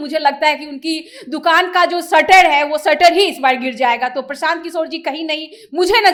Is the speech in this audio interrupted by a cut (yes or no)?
no